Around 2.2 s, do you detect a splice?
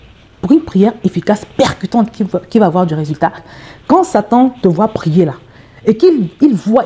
no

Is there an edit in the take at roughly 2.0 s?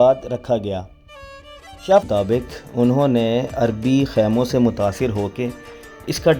yes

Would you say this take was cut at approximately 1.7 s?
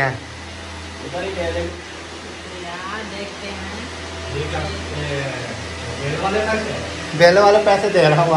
yes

